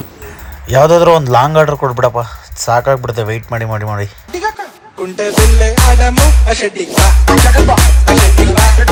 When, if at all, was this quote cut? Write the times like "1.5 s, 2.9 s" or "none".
none

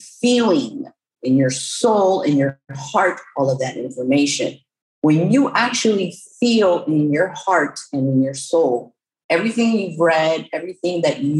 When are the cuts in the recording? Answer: none

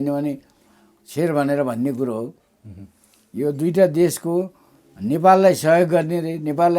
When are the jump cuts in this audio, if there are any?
none

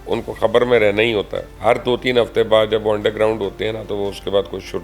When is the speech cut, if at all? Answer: 1.4 s

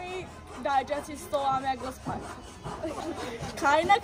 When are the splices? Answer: 3.0 s

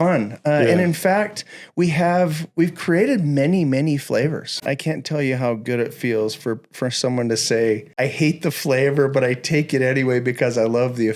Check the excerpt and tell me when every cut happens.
4.6 s, 7.9 s

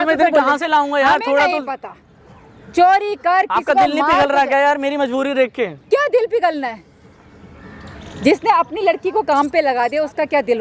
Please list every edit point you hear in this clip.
none

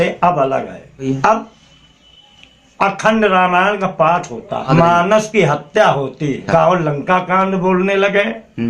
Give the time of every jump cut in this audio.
1.0 s, 4.7 s, 6.4 s

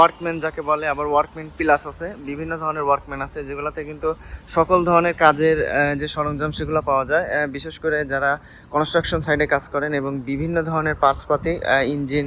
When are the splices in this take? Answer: none

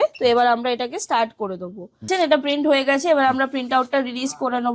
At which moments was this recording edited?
2.1 s

